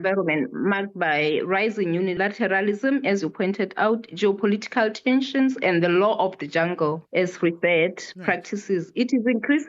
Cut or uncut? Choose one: uncut